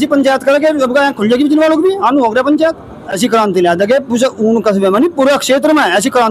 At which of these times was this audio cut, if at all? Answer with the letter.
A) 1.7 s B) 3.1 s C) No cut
B